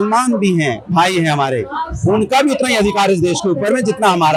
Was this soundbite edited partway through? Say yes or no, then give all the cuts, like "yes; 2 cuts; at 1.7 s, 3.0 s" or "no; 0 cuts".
no; 0 cuts